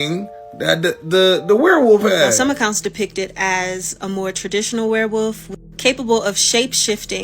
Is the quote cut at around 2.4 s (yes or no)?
yes